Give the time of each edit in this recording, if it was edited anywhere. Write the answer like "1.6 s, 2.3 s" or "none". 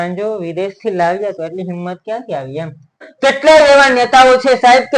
3.0 s